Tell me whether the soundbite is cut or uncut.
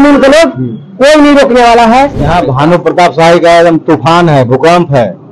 cut